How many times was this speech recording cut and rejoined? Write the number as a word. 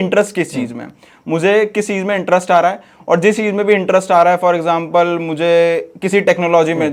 zero